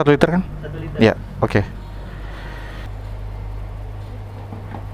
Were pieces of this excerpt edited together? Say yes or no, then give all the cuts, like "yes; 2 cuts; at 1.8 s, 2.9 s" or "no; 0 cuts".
yes; 1 cut; at 2.9 s